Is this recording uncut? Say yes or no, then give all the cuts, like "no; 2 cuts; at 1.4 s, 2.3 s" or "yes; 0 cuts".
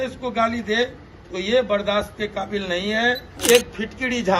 no; 1 cut; at 3.4 s